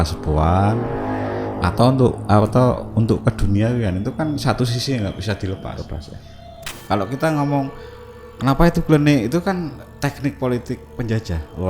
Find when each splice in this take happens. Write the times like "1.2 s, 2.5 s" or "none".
6.7 s